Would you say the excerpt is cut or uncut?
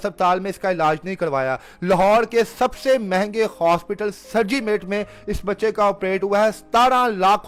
uncut